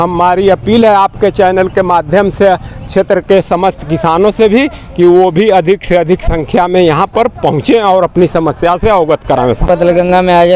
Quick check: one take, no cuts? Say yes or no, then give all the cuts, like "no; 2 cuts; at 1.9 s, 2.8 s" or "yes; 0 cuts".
no; 1 cut; at 9.6 s